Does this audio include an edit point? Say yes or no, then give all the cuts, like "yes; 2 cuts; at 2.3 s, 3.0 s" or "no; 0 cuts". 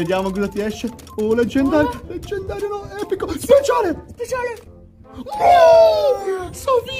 no; 0 cuts